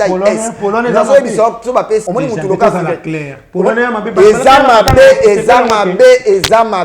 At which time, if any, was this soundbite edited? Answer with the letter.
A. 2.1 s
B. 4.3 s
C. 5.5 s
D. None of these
A